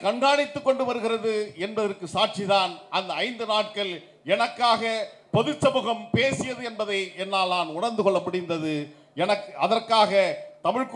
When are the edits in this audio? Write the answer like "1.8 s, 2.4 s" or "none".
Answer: none